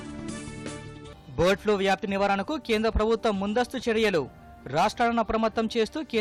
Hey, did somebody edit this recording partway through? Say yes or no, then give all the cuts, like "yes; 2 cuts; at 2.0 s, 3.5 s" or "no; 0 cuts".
no; 0 cuts